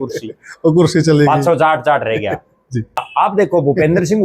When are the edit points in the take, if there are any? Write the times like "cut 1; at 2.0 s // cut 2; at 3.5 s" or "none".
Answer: cut 1; at 3.0 s